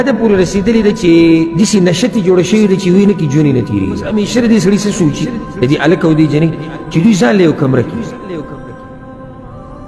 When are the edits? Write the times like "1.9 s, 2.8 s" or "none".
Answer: 1.5 s, 4.1 s